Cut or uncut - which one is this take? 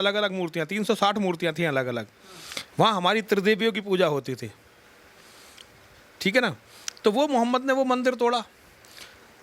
uncut